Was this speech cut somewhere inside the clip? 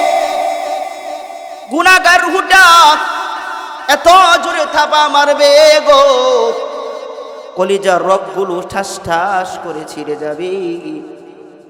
no; 0 cuts

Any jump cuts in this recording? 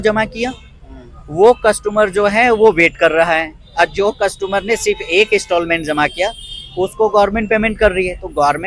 no; 0 cuts

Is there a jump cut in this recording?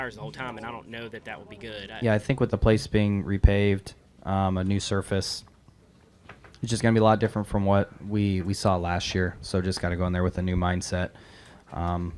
yes; 1 cut; at 1.9 s

